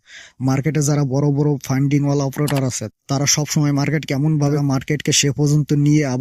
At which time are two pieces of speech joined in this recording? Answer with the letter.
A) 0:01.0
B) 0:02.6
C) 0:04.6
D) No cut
C